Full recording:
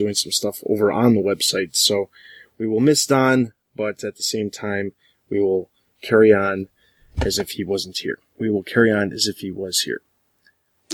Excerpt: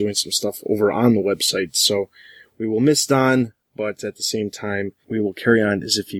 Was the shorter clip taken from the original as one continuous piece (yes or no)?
no